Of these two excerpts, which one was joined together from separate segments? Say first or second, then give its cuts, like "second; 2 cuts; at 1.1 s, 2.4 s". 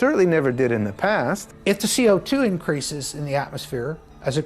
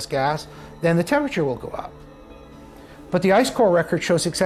first; 1 cut; at 1.5 s